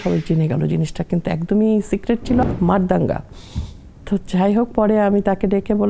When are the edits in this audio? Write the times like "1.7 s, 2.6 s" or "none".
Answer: 2.4 s